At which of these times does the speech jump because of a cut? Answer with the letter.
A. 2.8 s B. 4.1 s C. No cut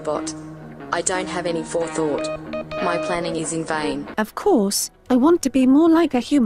B